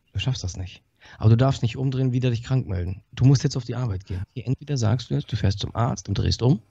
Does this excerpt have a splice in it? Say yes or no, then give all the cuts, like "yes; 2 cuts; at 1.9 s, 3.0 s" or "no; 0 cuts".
yes; 1 cut; at 4.2 s